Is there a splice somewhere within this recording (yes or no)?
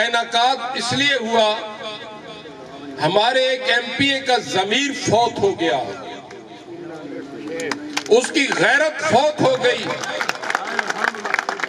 no